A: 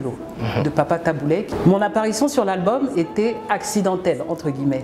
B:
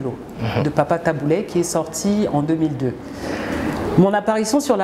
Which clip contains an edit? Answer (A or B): A